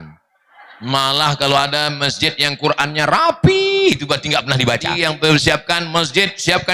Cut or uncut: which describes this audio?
cut